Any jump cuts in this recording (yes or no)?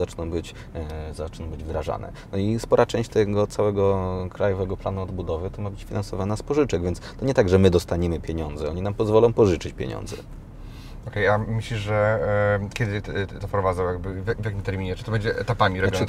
no